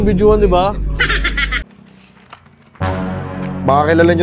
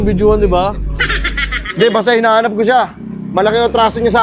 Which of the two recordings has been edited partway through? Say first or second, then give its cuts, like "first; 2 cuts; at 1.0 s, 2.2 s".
first; 1 cut; at 1.6 s